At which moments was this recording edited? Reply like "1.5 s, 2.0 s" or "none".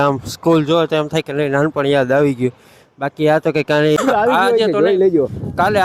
4.0 s